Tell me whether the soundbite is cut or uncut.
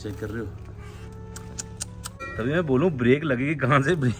uncut